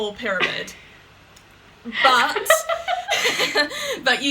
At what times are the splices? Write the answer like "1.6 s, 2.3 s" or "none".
none